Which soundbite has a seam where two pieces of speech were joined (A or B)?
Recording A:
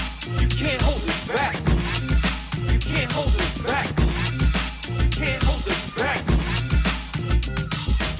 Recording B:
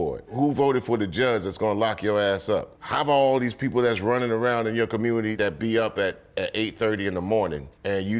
B